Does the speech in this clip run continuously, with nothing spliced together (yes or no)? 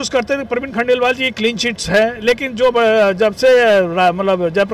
yes